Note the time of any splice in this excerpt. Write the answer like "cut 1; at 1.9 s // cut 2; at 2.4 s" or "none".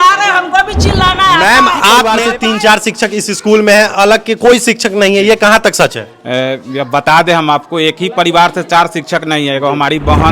cut 1; at 2.2 s